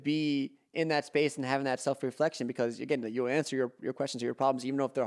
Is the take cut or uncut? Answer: uncut